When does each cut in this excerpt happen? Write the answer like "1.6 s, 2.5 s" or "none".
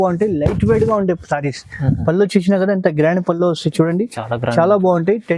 none